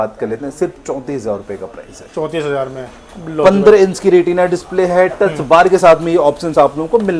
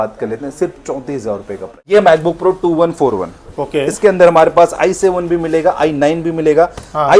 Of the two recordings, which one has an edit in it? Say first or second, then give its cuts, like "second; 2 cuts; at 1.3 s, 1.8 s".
second; 1 cut; at 1.8 s